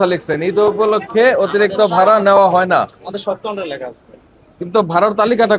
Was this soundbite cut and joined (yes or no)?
no